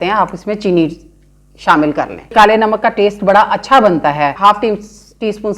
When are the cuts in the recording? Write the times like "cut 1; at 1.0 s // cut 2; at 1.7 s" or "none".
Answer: cut 1; at 2.3 s // cut 2; at 4.4 s